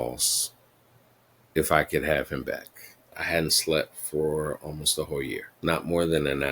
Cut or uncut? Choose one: cut